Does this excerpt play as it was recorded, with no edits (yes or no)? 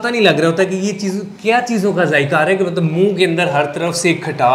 yes